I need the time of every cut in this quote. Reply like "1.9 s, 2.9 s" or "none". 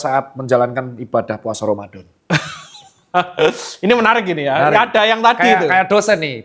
none

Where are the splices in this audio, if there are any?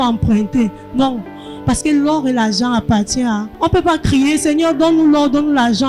3.5 s

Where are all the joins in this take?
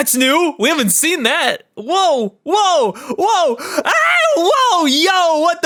none

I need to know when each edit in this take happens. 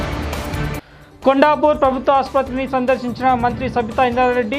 0.9 s

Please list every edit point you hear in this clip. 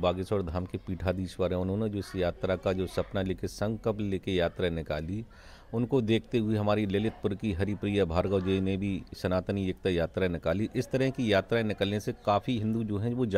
none

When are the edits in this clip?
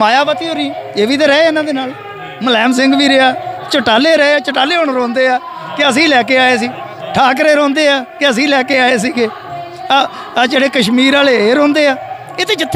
none

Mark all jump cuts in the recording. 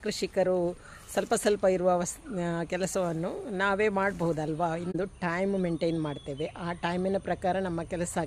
4.9 s

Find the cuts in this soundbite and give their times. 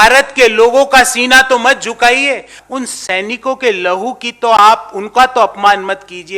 2.5 s

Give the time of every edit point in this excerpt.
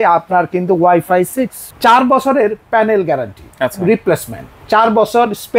1.6 s

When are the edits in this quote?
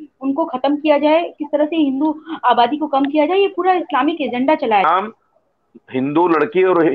4.8 s

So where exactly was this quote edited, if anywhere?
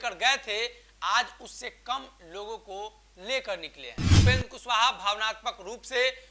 4.1 s

